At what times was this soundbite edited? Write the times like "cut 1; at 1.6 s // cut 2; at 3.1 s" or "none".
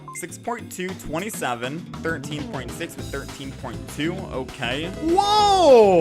cut 1; at 4.9 s